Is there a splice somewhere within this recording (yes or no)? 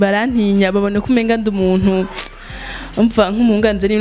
no